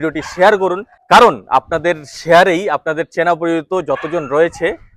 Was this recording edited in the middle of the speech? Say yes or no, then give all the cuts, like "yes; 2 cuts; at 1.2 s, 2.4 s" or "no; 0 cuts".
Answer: yes; 1 cut; at 0.9 s